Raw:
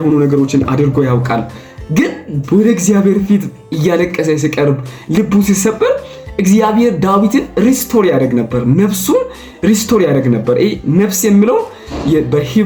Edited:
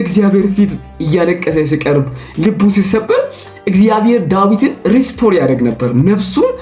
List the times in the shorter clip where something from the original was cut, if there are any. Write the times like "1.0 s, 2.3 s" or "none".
none